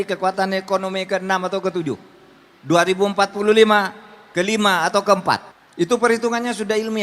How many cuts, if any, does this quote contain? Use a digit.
1